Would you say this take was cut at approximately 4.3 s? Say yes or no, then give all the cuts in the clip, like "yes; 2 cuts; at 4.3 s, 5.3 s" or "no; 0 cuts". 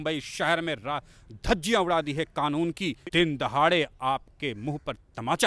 no; 1 cut; at 3.0 s